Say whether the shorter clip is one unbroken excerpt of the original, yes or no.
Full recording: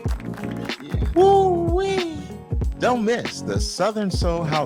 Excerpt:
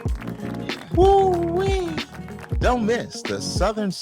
no